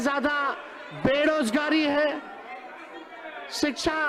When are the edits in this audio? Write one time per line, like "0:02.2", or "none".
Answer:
none